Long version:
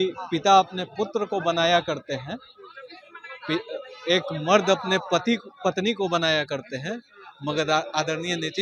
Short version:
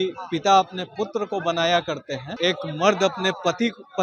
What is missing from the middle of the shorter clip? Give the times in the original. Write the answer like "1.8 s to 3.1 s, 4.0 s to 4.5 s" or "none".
2.3 s to 3.9 s